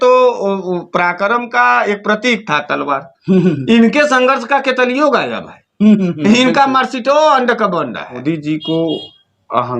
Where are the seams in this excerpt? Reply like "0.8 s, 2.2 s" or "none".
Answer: 8.2 s